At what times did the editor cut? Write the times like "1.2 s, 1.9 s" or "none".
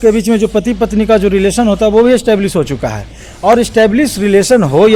none